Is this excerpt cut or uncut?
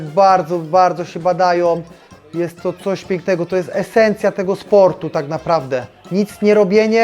uncut